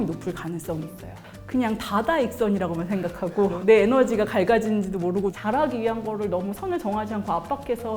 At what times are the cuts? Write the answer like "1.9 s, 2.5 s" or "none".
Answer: 1.3 s, 5.4 s